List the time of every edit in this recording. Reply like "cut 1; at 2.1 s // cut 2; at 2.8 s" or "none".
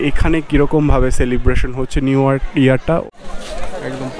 cut 1; at 3.1 s